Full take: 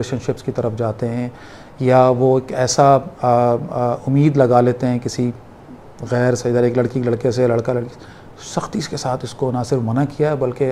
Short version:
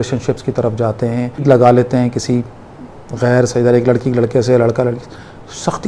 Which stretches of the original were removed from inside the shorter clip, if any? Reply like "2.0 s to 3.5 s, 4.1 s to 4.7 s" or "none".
1.4 s to 4.3 s